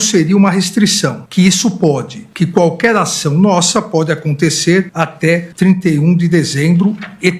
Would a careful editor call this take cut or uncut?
cut